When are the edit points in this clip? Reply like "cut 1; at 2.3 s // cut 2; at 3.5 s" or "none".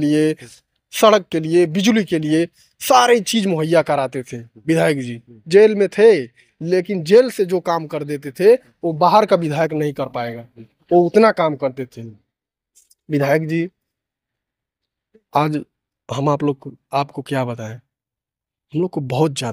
none